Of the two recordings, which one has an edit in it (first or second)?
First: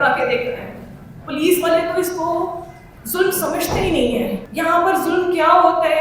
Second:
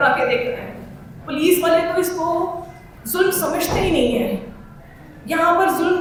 first